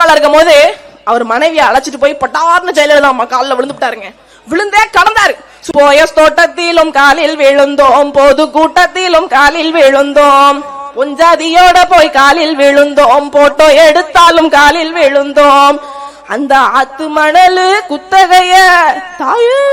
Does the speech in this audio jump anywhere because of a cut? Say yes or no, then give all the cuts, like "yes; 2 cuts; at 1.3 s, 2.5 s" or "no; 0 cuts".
yes; 1 cut; at 5.5 s